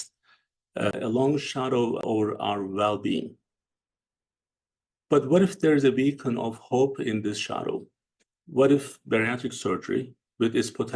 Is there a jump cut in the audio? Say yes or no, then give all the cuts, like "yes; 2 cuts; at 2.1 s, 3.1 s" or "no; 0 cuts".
yes; 2 cuts; at 0.9 s, 2.0 s